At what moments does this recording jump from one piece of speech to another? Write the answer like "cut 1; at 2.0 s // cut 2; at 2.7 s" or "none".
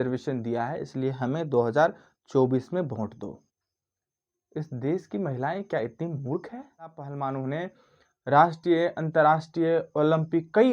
cut 1; at 6.9 s